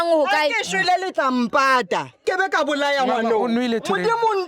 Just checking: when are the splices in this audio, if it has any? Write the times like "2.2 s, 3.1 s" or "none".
2.2 s